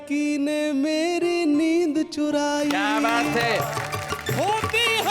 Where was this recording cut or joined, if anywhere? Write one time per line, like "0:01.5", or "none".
0:03.7